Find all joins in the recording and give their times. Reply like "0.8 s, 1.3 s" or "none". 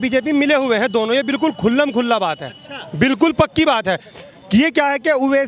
none